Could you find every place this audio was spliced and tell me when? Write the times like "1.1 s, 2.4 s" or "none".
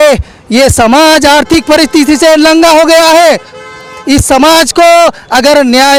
none